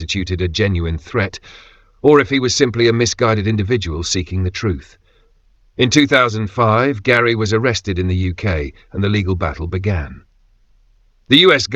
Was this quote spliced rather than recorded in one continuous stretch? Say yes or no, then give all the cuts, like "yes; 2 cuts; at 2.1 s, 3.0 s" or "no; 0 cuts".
no; 0 cuts